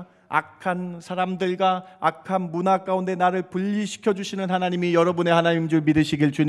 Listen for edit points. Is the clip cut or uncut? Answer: uncut